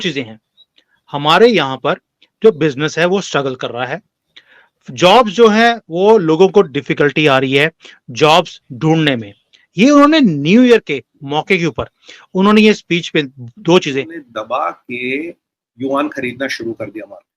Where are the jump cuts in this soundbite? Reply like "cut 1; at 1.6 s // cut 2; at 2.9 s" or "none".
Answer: cut 1; at 14.2 s